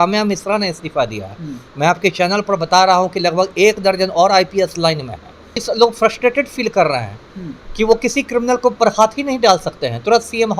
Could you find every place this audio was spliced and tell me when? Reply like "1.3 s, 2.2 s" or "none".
5.6 s